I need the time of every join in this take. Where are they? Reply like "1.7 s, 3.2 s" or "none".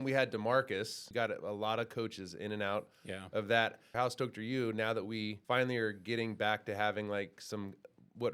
1.0 s, 3.9 s, 5.4 s